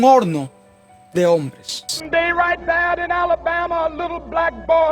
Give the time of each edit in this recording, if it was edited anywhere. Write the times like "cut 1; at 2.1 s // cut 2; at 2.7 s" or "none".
cut 1; at 2.0 s